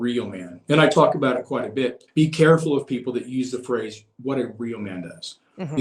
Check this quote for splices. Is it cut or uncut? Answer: cut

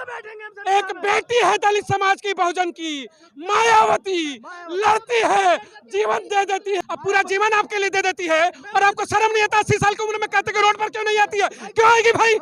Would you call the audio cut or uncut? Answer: cut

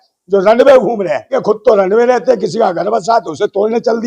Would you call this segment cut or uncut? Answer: cut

